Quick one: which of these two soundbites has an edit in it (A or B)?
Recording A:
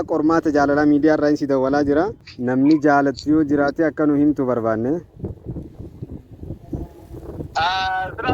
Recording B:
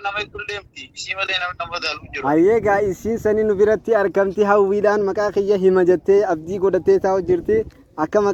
A